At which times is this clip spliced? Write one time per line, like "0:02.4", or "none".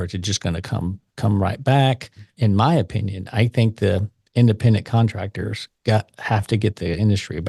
0:02.2